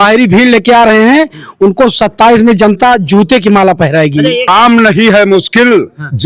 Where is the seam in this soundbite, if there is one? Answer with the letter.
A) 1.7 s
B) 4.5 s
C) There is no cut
B